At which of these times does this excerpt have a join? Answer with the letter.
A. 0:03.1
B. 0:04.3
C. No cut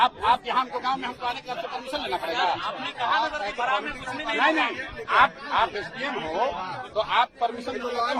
C